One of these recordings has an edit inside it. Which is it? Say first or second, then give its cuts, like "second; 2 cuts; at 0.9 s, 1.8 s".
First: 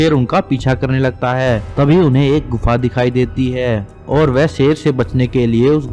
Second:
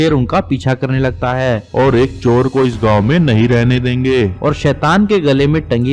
second; 2 cuts; at 1.6 s, 4.4 s